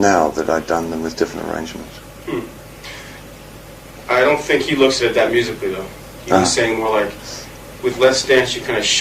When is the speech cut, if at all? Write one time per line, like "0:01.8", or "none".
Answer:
0:07.0